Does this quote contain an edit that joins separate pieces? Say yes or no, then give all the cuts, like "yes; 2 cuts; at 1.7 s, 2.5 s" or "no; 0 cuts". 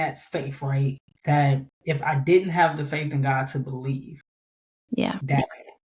yes; 1 cut; at 1.1 s